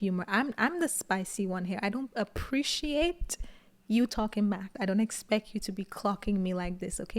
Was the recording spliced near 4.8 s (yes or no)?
yes